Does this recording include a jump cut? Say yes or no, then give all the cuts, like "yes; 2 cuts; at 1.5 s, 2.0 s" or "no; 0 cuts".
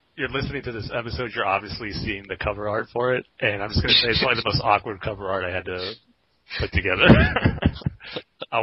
yes; 1 cut; at 3.3 s